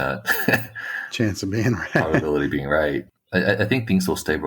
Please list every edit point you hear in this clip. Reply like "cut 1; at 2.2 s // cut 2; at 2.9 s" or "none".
cut 1; at 3.1 s